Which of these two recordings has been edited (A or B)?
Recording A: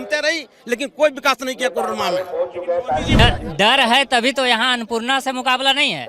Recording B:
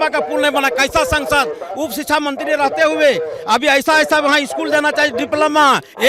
A